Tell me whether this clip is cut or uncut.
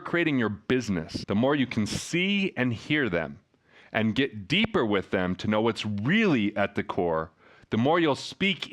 cut